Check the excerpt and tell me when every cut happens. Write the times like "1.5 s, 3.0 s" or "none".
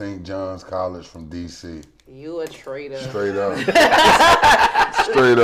none

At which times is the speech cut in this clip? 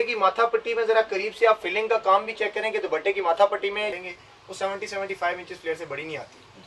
4.0 s

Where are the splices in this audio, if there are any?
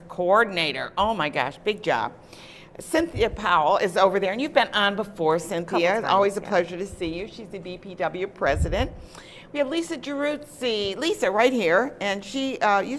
8.0 s

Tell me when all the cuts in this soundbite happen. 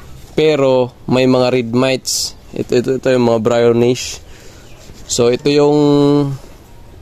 none

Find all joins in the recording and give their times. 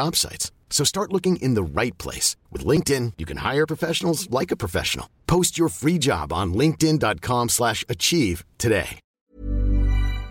9.3 s

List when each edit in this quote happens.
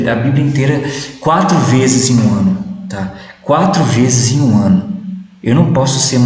none

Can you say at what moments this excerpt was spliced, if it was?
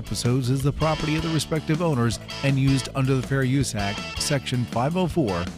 none

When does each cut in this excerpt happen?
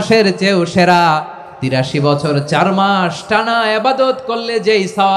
1.8 s

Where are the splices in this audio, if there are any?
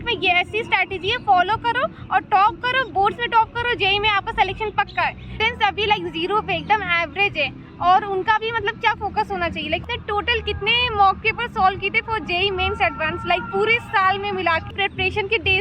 5.4 s, 9.8 s, 14.7 s

